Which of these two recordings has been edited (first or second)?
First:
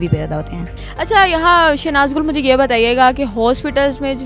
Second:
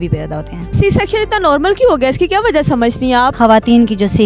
second